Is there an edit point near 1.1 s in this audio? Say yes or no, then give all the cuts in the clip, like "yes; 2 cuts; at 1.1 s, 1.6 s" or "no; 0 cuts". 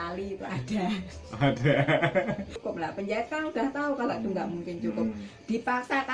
no; 1 cut; at 2.6 s